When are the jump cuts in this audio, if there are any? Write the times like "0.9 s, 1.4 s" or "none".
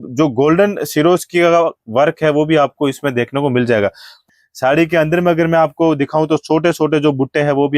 4.2 s

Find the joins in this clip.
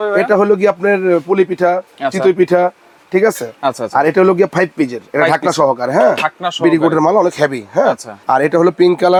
none

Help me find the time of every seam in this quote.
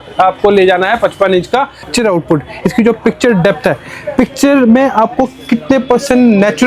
1.9 s

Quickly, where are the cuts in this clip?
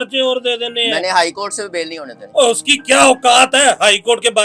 none

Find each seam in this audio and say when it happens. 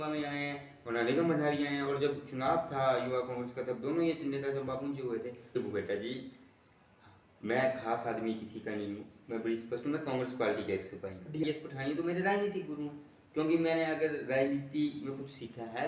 5.5 s, 11.4 s

